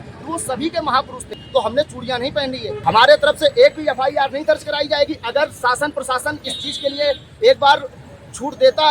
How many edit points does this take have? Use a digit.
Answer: 2